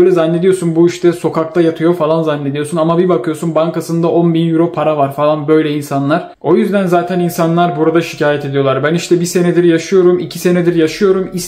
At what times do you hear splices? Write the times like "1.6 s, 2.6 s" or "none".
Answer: 6.3 s